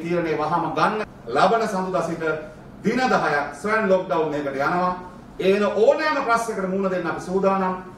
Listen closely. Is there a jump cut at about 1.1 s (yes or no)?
yes